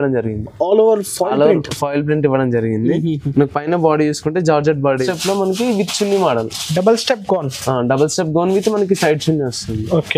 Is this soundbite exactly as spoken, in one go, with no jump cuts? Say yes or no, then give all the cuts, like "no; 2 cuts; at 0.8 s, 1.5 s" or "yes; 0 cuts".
no; 1 cut; at 5.1 s